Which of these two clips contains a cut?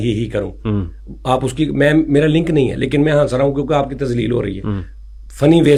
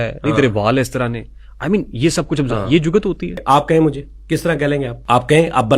second; 2 cuts; at 3.3 s, 5.0 s

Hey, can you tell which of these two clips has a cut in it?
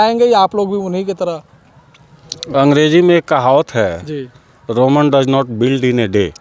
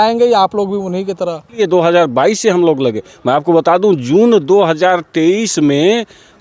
second; 1 cut; at 1.6 s

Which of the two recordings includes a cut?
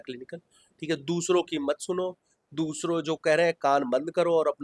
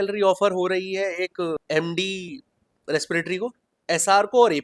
second; 2 cuts; at 1.6 s, 3.7 s

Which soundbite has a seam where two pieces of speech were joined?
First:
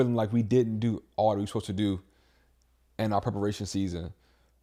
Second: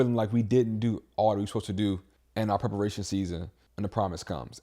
second; 2 cuts; at 2.2 s, 3.6 s

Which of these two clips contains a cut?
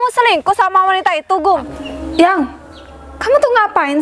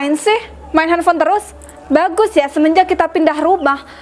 first; 1 cut; at 1.8 s

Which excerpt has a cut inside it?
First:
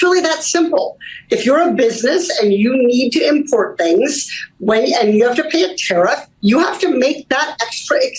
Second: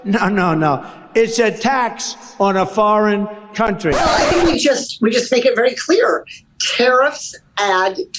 second; 1 cut; at 4.0 s

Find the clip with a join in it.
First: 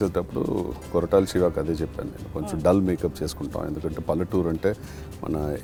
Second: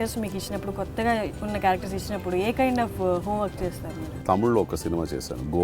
second; 1 cut; at 4.2 s

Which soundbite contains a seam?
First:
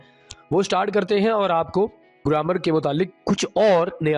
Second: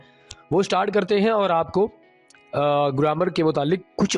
first; 1 cut; at 2.2 s

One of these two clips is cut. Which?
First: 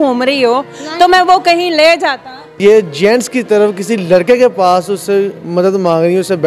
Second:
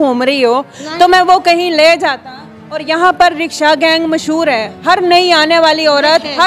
first; 1 cut; at 2.6 s

